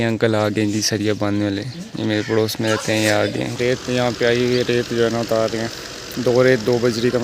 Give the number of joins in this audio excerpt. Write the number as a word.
one